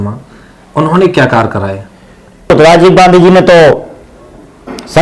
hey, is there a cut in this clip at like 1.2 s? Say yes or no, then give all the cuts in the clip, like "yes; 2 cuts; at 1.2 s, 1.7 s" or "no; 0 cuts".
no; 1 cut; at 2.5 s